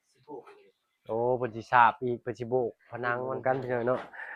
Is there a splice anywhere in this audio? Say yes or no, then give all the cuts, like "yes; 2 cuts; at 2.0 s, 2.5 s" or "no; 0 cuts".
yes; 1 cut; at 3.3 s